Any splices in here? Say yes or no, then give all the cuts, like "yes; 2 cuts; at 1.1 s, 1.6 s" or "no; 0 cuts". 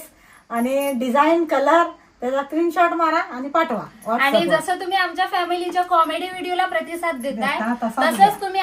no; 0 cuts